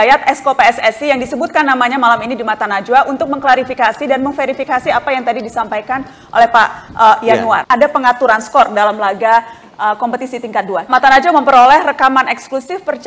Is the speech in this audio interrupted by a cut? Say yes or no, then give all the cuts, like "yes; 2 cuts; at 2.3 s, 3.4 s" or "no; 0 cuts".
yes; 1 cut; at 7.6 s